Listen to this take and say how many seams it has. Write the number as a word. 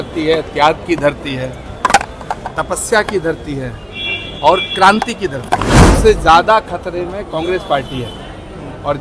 one